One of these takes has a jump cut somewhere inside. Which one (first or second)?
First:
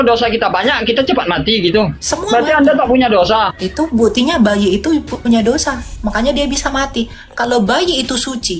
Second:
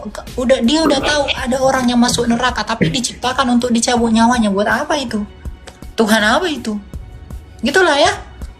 first